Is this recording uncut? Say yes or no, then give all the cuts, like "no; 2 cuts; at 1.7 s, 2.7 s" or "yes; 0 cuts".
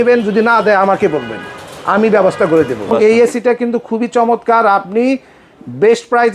no; 1 cut; at 2.9 s